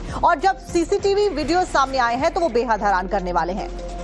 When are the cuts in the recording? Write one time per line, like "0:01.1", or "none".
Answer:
0:01.7